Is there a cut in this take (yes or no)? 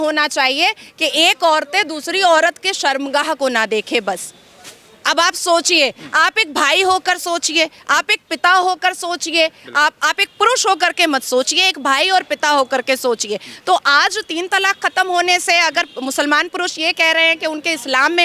no